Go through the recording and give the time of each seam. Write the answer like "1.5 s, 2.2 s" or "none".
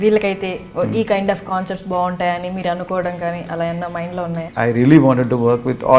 4.4 s